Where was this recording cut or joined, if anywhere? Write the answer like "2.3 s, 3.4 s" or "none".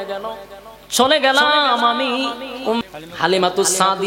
2.8 s